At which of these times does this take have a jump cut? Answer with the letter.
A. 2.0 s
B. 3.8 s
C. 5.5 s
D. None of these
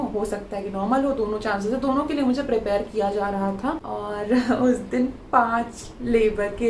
B